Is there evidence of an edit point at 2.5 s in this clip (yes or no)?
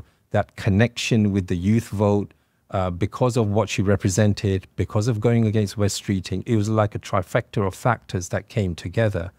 no